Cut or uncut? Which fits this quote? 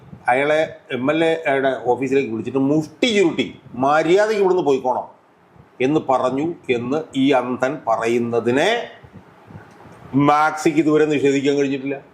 uncut